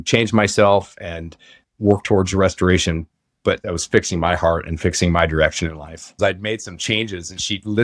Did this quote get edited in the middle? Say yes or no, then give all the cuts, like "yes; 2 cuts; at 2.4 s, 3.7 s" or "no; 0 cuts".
yes; 3 cuts; at 1.6 s, 3.7 s, 6.1 s